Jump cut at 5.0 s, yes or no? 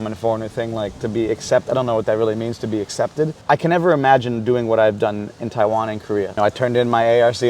no